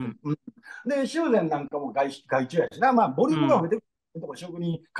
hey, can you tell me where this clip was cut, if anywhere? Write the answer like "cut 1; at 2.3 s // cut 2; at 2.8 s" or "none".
none